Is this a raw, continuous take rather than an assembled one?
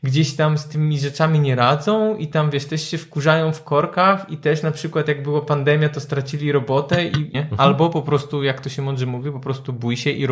no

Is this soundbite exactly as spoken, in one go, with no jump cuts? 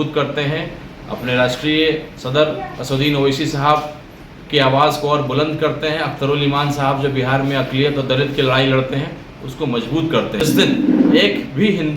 no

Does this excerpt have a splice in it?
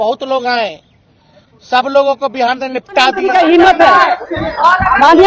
yes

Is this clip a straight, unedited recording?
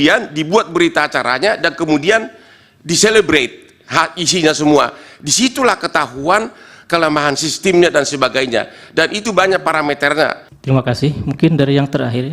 no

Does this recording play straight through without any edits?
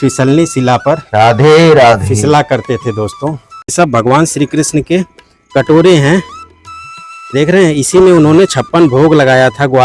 no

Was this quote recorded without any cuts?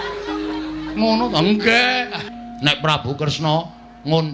no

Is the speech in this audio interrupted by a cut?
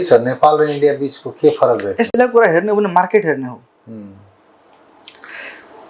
yes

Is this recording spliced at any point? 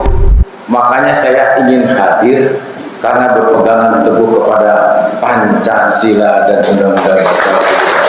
no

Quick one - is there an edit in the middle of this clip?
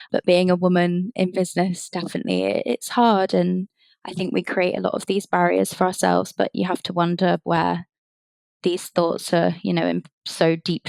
no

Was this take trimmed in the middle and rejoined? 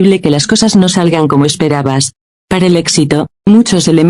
yes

